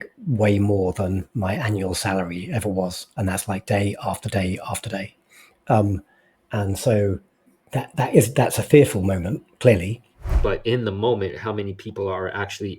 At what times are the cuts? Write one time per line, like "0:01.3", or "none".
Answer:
0:10.3

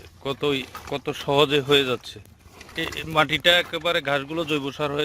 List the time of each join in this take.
0:02.8

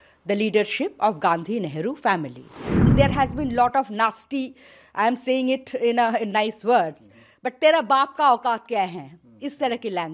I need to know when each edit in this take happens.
0:02.9

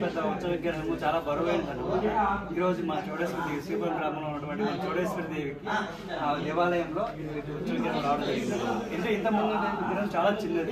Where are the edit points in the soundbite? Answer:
none

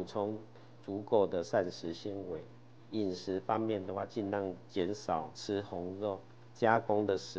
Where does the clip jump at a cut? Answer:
0:02.8
0:05.3

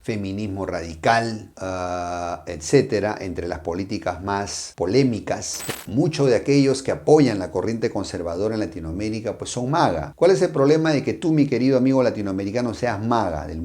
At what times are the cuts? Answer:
0:05.7

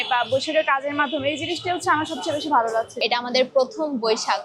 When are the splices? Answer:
0:02.9

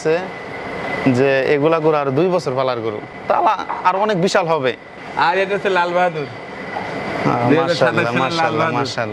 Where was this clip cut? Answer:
none

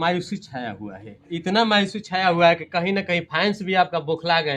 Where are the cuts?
0:01.3

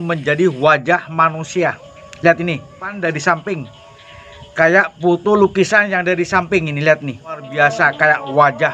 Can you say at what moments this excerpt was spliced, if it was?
0:03.0
0:07.5

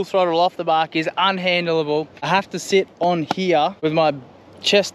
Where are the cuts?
0:02.2
0:03.8

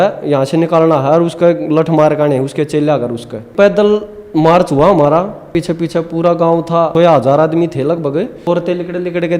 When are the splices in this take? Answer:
0:03.5
0:05.5
0:06.9
0:08.5

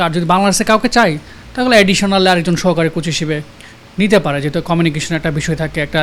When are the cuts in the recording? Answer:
none

